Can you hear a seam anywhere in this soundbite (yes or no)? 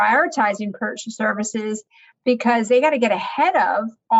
no